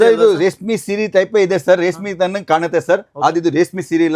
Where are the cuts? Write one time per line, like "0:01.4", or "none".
none